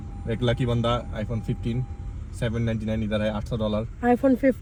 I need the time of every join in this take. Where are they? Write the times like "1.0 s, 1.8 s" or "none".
none